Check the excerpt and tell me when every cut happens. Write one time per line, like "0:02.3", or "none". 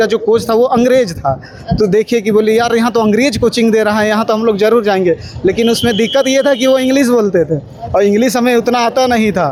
none